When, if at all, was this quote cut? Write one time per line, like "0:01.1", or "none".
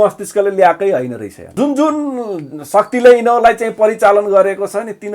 0:01.4